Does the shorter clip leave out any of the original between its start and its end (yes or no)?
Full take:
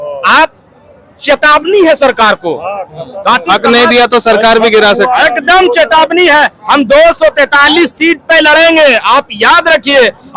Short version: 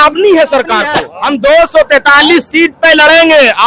yes